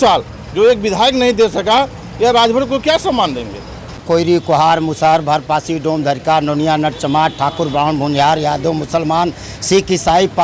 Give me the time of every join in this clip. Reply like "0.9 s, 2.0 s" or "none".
4.0 s